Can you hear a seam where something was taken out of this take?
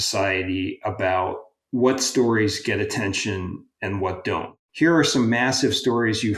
yes; 3 cuts; at 1.5 s, 3.7 s, 4.6 s

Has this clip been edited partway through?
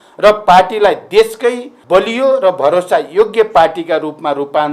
yes; 1 cut; at 1.7 s

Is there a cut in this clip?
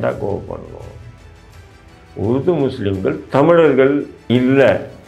yes; 1 cut; at 4.1 s

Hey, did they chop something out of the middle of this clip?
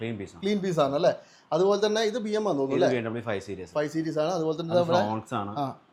no; 0 cuts

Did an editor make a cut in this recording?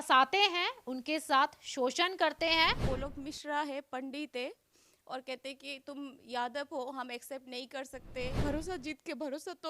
yes; 2 cuts; at 2.8 s, 8.4 s

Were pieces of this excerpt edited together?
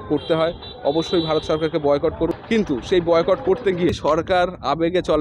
yes; 2 cuts; at 2.4 s, 3.9 s

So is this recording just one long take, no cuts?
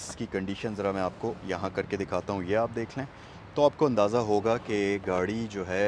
yes; 0 cuts

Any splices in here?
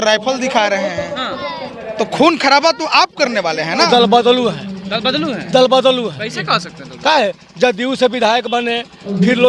yes; 1 cut; at 3.9 s

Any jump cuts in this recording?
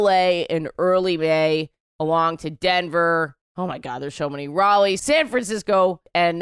no; 0 cuts

